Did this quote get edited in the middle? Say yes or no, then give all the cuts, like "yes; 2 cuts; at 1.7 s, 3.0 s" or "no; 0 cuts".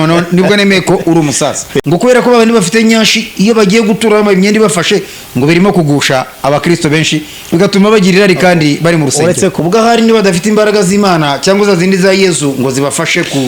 yes; 2 cuts; at 1.7 s, 9.5 s